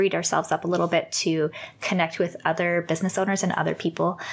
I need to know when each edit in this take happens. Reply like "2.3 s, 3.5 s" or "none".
none